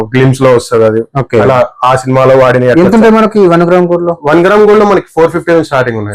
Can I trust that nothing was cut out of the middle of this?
yes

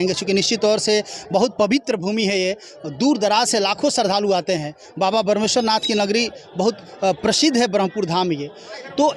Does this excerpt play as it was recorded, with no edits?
yes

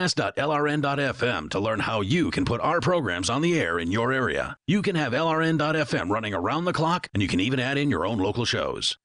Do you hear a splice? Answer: no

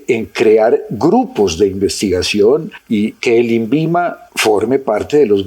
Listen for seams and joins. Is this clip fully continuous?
no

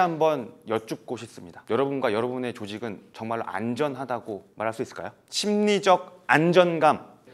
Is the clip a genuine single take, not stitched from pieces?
yes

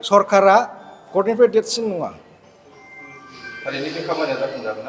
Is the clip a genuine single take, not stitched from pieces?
yes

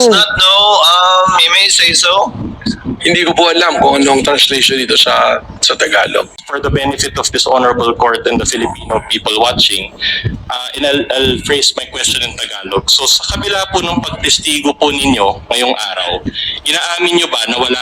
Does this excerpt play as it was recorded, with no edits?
no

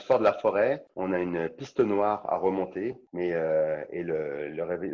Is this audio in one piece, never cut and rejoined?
no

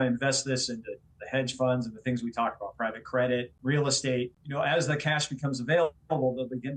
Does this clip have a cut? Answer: yes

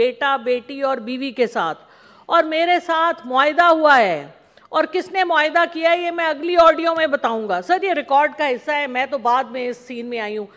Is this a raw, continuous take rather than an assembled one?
yes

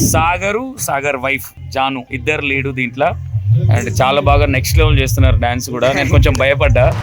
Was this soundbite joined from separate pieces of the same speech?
yes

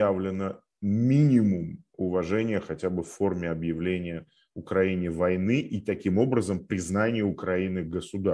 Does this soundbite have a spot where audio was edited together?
no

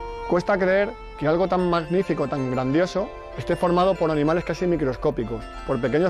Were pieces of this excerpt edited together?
no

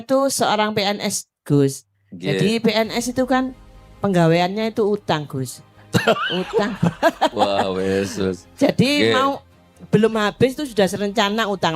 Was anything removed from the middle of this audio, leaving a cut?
no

